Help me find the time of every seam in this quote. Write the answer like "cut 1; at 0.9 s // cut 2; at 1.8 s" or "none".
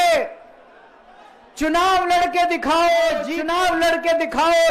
cut 1; at 3.4 s